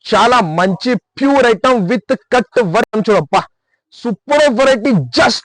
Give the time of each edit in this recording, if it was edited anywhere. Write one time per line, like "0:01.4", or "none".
0:02.9